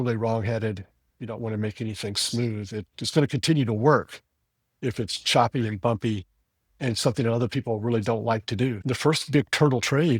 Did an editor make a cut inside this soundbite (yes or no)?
yes